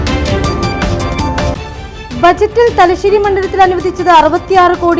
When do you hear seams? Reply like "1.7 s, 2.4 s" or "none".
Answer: 1.4 s